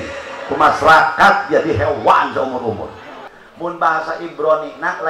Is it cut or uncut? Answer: cut